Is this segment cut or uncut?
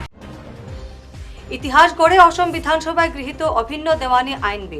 cut